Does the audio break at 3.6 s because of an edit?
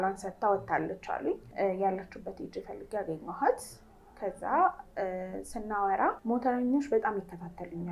no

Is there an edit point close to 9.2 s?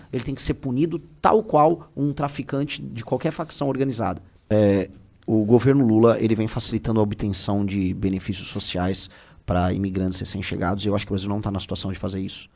no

